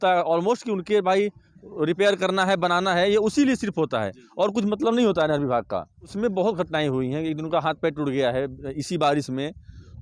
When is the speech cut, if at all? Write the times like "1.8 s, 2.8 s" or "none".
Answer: 6.1 s